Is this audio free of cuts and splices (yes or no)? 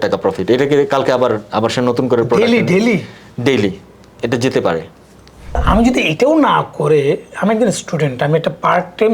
no